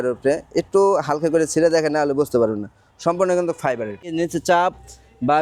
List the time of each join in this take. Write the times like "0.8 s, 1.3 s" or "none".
4.2 s